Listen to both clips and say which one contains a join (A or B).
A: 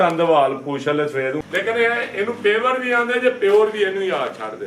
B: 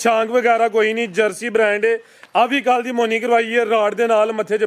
A